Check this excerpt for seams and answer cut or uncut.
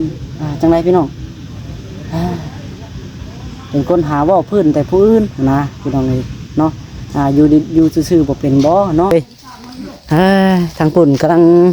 cut